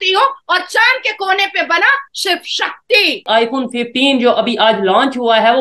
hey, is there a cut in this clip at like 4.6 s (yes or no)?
no